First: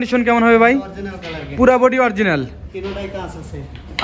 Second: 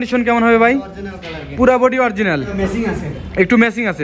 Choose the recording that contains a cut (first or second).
second